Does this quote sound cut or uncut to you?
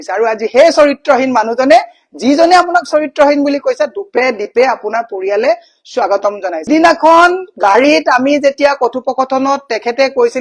cut